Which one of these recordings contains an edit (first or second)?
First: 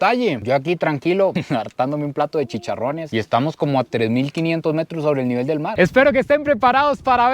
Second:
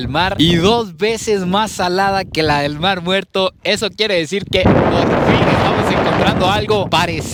first